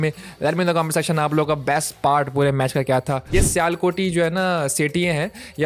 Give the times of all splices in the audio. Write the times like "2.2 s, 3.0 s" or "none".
3.2 s